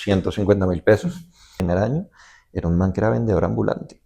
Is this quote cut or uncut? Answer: cut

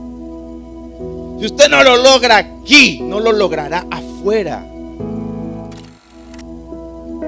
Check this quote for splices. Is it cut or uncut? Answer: cut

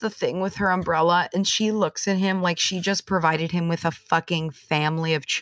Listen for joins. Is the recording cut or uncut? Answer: uncut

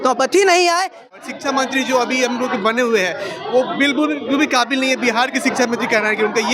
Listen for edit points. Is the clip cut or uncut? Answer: cut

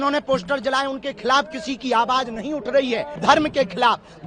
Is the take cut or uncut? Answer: cut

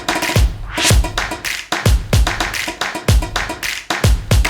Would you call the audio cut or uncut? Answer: cut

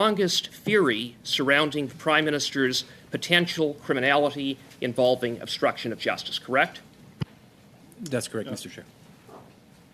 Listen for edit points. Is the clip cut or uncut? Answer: uncut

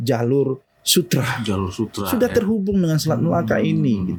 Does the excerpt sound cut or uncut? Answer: uncut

